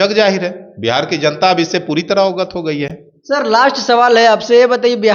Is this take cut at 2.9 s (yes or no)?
no